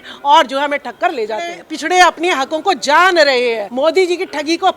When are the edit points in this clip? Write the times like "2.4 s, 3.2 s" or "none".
1.7 s, 3.7 s